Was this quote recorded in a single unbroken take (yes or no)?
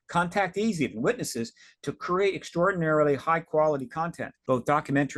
no